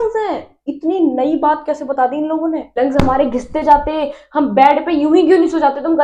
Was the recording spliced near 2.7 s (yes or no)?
yes